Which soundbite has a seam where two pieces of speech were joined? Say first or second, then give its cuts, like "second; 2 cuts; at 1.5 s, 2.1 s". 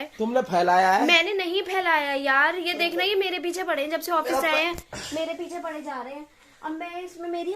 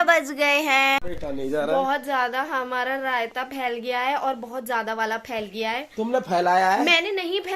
second; 1 cut; at 1.0 s